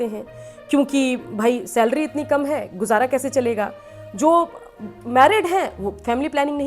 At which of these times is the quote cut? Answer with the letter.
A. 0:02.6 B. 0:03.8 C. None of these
C